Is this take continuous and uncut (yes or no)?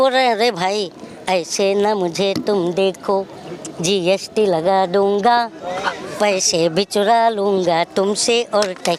yes